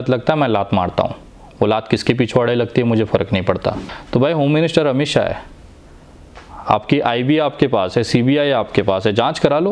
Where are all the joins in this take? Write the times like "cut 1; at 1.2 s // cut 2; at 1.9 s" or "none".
cut 1; at 3.9 s